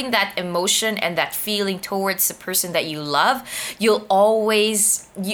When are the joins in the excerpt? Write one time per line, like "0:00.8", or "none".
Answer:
none